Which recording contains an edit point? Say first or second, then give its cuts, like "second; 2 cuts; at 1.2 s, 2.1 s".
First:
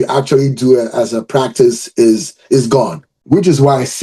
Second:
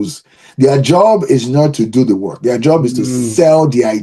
first; 1 cut; at 3.1 s